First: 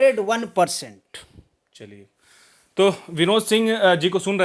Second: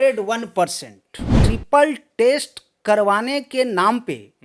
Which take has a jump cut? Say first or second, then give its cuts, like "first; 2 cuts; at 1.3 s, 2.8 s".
second; 1 cut; at 1.4 s